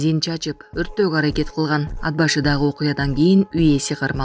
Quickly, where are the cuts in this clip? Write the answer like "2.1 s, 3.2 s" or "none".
none